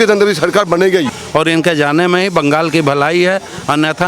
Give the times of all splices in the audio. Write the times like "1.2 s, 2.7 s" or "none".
1.2 s